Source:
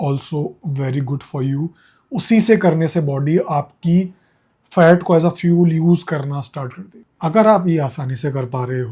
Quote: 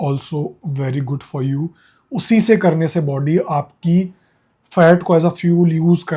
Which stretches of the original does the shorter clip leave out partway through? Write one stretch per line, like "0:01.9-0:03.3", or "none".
none